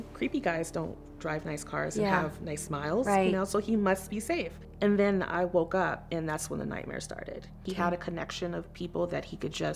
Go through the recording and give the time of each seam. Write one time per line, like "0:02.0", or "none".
0:04.6
0:07.6